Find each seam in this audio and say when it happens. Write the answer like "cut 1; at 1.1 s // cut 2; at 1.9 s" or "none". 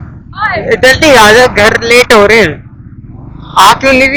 none